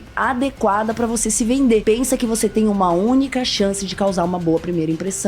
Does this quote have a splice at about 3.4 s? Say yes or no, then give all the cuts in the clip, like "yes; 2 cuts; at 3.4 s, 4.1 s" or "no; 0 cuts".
no; 1 cut; at 1.8 s